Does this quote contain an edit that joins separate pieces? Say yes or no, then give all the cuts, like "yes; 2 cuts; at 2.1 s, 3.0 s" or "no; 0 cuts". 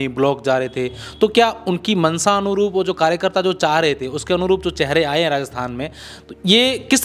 no; 0 cuts